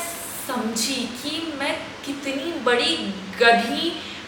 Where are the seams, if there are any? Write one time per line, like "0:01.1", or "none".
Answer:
none